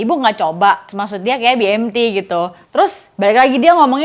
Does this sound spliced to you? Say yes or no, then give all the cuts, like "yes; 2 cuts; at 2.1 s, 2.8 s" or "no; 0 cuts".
yes; 2 cuts; at 0.9 s, 2.6 s